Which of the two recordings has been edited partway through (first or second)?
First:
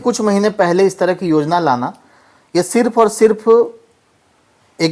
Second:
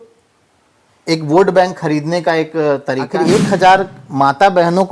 second